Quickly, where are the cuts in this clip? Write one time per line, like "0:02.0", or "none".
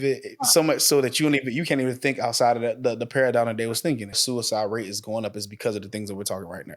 0:04.2